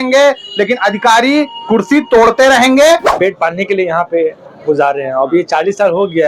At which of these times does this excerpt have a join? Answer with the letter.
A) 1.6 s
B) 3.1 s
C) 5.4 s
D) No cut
B